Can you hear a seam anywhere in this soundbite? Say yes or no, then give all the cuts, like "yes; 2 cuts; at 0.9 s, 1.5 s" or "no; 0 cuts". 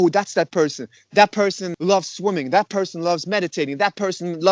no; 0 cuts